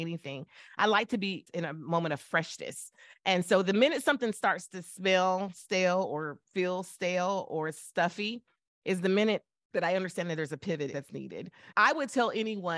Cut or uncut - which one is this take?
cut